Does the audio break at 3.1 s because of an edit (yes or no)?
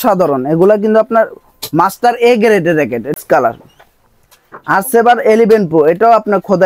yes